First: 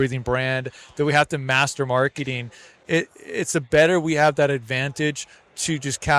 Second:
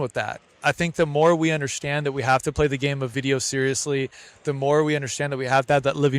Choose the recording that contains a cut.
second; 1 cut; at 3.1 s

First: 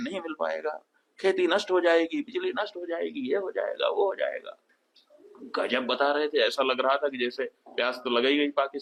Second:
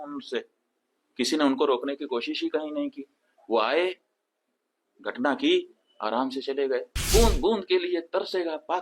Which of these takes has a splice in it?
second; 1 cut; at 7.0 s

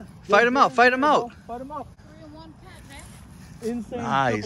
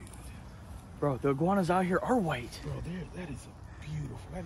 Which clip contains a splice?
first; 1 cut; at 2.0 s

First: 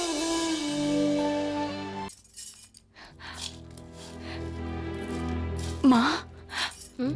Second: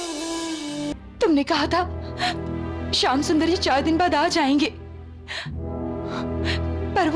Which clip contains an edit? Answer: second; 1 cut; at 0.9 s

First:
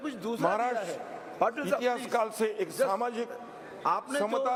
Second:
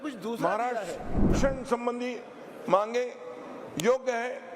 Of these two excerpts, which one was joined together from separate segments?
second; 1 cut; at 1.3 s

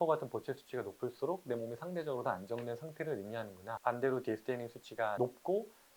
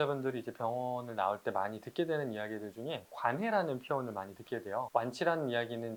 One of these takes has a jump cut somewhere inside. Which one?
first; 1 cut; at 3.8 s

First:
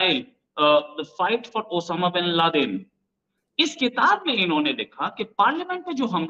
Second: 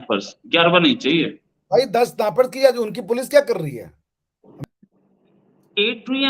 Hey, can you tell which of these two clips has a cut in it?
second; 1 cut; at 4.6 s

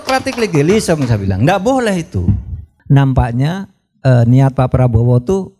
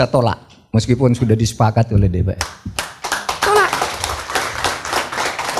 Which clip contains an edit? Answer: first; 1 cut; at 2.7 s

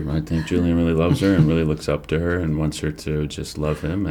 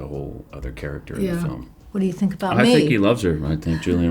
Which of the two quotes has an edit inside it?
second; 1 cut; at 1.7 s

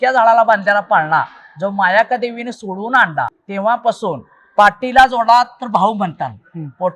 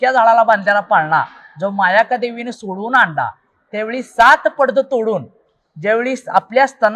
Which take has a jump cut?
first; 1 cut; at 3.4 s

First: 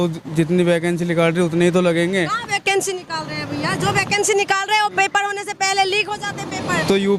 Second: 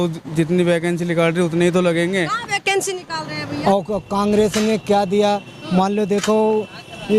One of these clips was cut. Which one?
second; 1 cut; at 3.5 s

